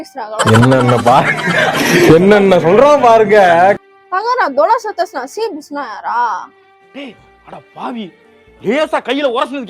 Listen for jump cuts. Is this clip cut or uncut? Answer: uncut